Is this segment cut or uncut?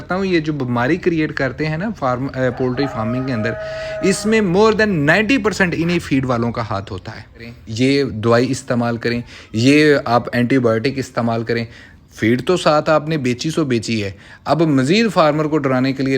cut